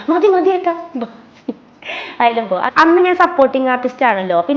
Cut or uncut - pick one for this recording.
cut